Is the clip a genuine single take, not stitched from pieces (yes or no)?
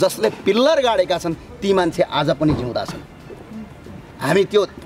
yes